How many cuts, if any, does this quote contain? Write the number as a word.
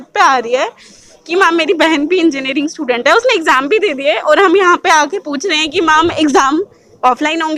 zero